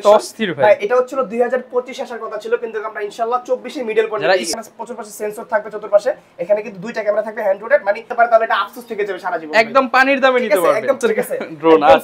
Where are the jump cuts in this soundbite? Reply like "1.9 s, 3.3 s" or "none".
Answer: 4.5 s, 8.1 s, 11.0 s

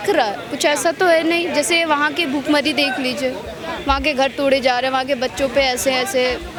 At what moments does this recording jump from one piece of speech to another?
none

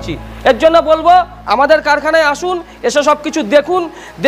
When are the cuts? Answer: none

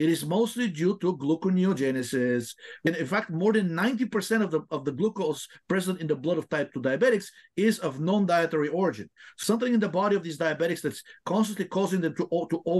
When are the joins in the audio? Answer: 2.8 s, 9.3 s

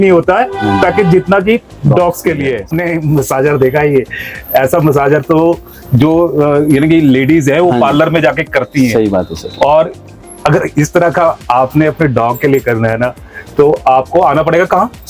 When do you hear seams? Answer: 2.7 s

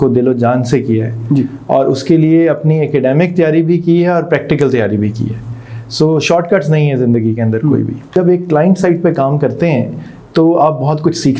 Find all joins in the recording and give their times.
8.1 s

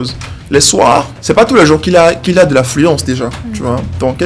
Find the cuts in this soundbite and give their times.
1.1 s

